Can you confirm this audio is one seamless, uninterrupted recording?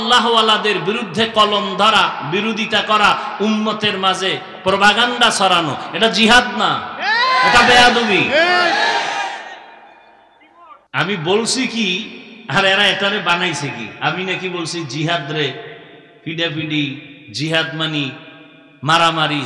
no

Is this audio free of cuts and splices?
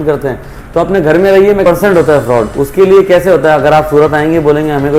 no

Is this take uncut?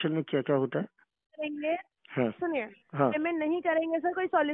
no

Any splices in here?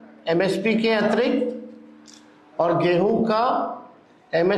no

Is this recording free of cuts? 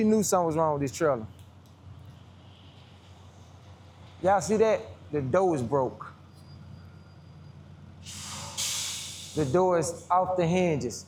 yes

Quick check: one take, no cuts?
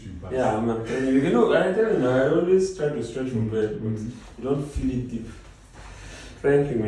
yes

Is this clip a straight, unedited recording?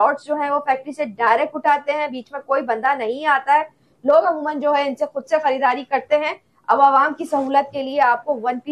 yes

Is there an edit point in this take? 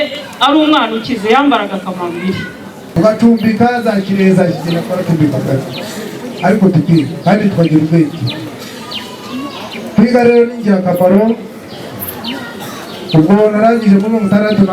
yes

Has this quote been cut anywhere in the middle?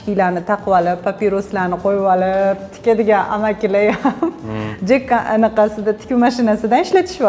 no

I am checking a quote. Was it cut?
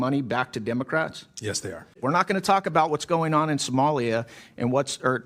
yes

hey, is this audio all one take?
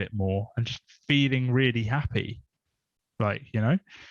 yes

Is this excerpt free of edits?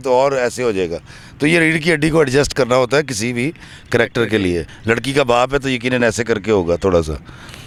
yes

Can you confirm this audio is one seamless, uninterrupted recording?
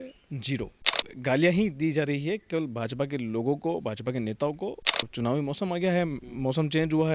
no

